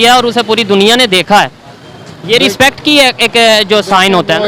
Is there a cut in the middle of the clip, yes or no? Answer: no